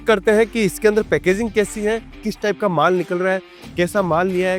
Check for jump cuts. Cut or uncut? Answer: cut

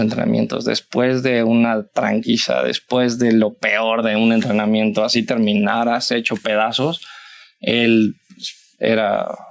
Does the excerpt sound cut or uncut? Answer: uncut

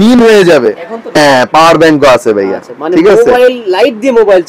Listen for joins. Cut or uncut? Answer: cut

